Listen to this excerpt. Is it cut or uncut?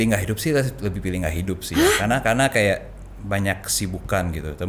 uncut